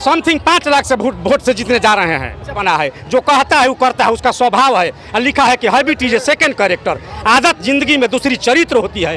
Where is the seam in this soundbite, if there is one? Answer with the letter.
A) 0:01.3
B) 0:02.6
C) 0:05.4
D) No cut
B